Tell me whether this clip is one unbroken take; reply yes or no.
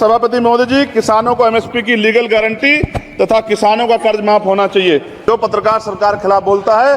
no